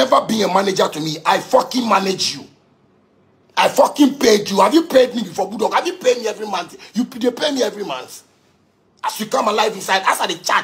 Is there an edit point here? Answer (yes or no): no